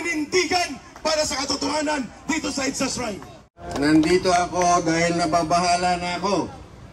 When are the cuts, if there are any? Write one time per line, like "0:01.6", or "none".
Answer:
0:03.6